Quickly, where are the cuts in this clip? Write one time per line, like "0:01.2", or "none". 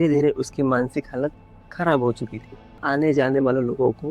0:02.8